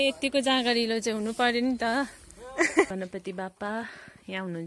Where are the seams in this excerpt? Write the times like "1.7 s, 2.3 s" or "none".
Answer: 2.9 s